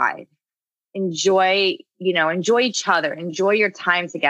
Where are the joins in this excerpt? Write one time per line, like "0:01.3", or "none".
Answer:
none